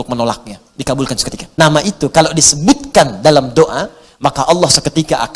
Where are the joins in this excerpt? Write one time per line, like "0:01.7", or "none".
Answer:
0:01.4